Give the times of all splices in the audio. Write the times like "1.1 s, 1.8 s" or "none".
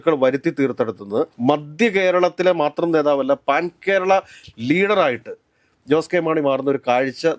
none